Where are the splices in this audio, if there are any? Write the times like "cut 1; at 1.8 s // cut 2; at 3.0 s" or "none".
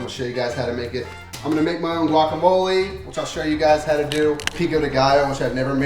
cut 1; at 1.2 s // cut 2; at 4.6 s

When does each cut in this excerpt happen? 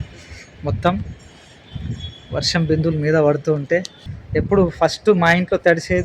cut 1; at 4.0 s

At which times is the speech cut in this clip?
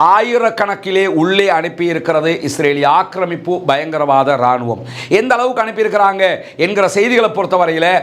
none

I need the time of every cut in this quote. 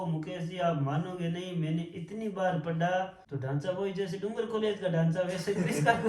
cut 1; at 3.2 s

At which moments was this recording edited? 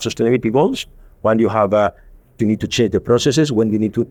none

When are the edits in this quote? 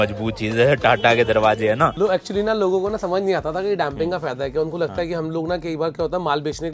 cut 1; at 1.9 s

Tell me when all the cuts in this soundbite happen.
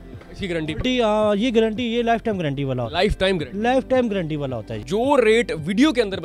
cut 1; at 4.8 s

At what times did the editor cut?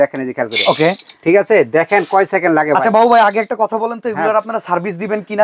none

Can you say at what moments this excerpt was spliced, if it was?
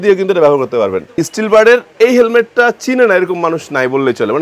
cut 1; at 1.3 s

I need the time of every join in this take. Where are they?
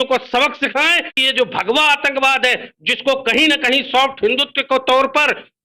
cut 1; at 1.1 s

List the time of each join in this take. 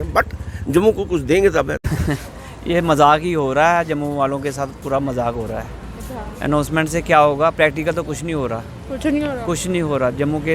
cut 1; at 1.8 s

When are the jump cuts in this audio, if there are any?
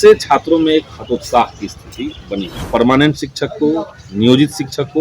cut 1; at 2.5 s

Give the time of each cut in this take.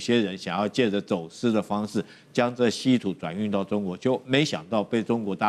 none

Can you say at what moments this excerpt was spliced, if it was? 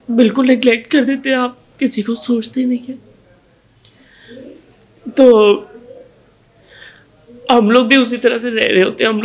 none

